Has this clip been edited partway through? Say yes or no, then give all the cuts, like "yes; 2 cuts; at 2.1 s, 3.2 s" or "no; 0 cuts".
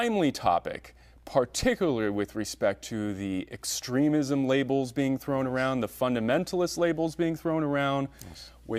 no; 0 cuts